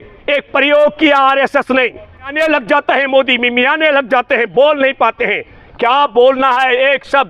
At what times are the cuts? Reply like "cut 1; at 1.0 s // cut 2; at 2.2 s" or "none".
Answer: cut 1; at 2.3 s